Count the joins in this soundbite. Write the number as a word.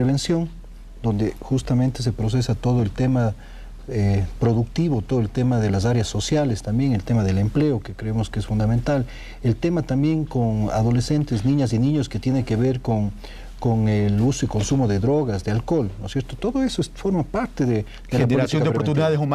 one